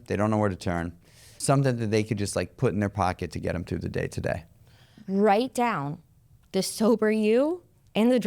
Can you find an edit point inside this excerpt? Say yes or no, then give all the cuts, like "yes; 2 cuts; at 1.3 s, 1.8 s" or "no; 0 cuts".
yes; 2 cuts; at 1.3 s, 4.9 s